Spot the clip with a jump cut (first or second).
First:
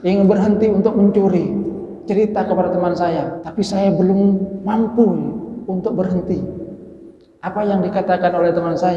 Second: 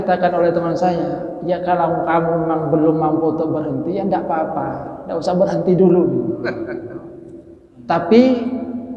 first